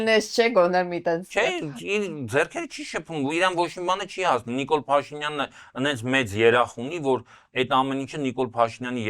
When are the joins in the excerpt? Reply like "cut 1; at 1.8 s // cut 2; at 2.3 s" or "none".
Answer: none